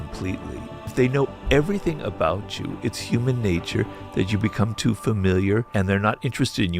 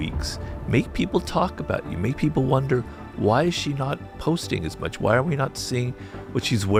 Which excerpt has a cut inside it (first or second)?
first